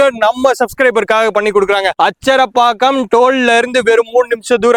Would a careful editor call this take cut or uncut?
uncut